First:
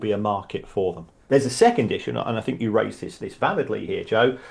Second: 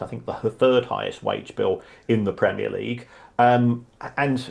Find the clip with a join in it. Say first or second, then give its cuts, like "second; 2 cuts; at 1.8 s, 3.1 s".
first; 1 cut; at 1.1 s